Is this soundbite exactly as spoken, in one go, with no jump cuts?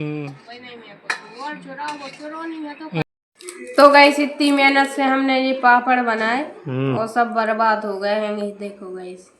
no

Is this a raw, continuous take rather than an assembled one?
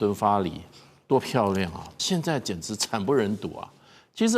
no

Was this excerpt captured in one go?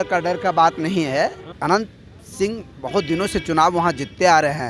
no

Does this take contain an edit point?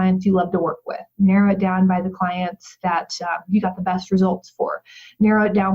yes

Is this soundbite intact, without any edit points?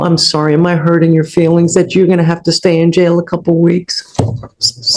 yes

